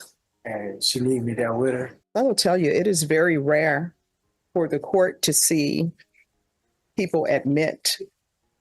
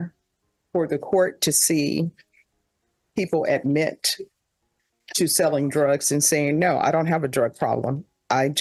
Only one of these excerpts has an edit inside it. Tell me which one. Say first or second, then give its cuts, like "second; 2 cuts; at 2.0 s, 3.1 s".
first; 1 cut; at 2.0 s